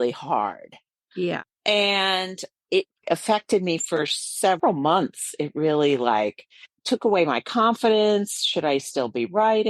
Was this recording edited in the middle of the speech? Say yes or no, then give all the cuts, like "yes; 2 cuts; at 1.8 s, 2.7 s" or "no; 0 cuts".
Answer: yes; 2 cuts; at 1.0 s, 3.0 s